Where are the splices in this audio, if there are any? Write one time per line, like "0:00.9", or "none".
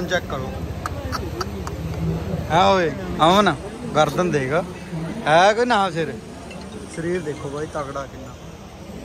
none